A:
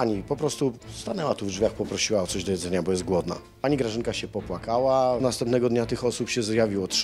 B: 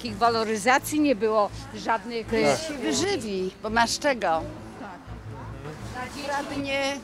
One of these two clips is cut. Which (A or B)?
A